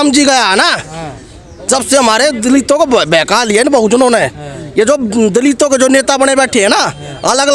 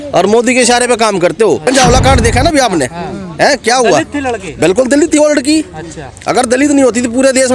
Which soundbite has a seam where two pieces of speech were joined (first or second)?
second